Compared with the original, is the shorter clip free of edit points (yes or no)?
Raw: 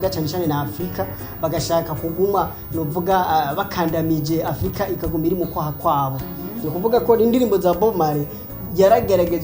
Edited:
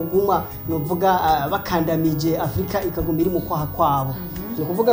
yes